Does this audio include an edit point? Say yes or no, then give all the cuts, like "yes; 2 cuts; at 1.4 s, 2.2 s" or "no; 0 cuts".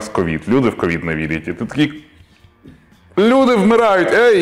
no; 0 cuts